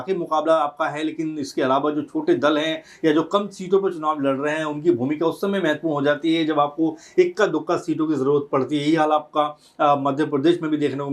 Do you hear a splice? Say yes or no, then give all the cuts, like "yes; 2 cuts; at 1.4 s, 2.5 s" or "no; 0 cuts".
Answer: no; 0 cuts